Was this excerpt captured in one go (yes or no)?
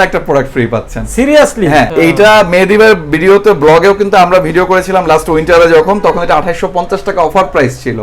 no